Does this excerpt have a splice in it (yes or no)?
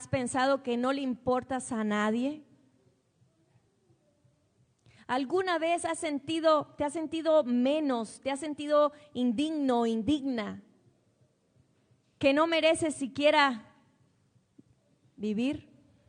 no